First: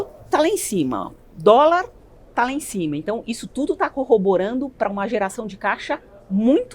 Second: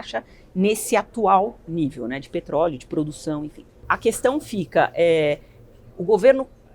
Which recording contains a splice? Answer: second; 1 cut; at 3.7 s

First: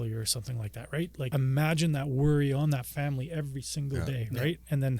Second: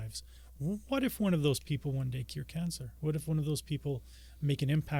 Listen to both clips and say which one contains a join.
first; 1 cut; at 1.3 s

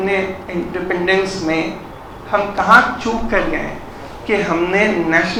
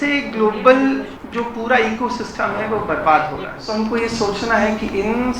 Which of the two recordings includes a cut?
second; 2 cuts; at 1.2 s, 3.6 s

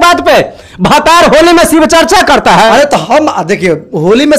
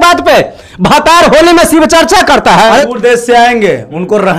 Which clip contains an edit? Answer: second; 1 cut; at 2.9 s

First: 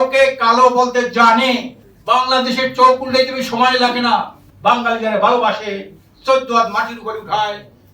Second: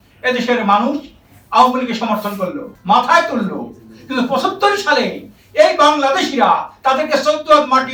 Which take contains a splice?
first; 1 cut; at 4.4 s

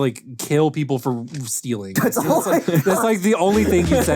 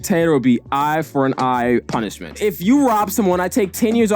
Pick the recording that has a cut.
second; 1 cut; at 2.4 s

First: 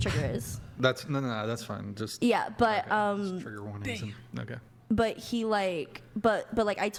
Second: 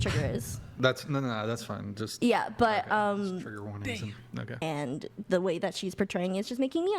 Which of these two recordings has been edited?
second; 1 cut; at 4.6 s

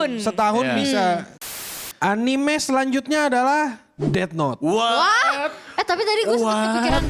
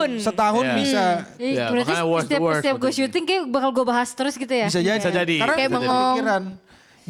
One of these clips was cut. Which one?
first; 1 cut; at 1.4 s

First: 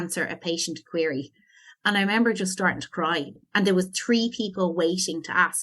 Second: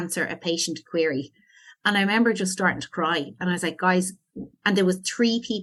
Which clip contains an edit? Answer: first; 1 cut; at 3.3 s

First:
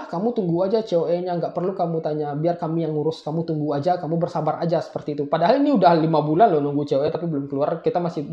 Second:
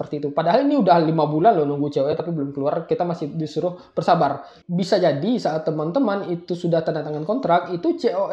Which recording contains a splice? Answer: second; 1 cut; at 4.6 s

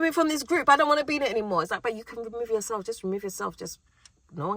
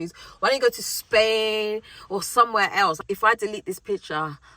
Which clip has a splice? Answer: second; 1 cut; at 3.0 s

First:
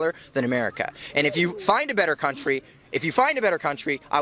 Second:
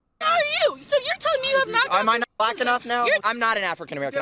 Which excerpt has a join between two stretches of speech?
second; 2 cuts; at 1.9 s, 3.2 s

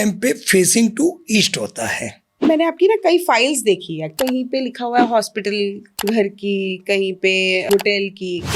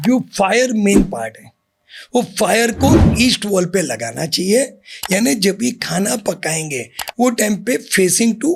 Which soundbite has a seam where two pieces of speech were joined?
first; 4 cuts; at 2.5 s, 4.1 s, 5.9 s, 7.7 s

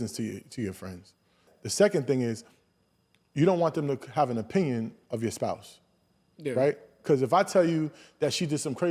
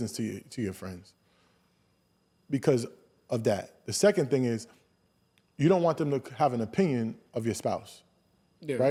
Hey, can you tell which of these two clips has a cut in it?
first; 1 cut; at 1.5 s

